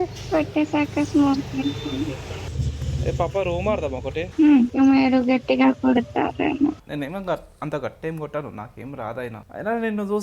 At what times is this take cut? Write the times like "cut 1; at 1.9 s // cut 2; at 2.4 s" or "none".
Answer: cut 1; at 2.4 s // cut 2; at 4.6 s // cut 3; at 6.8 s